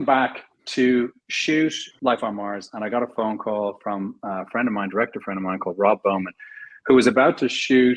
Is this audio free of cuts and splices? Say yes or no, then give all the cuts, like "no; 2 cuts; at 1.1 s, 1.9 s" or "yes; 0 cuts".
no; 1 cut; at 1.9 s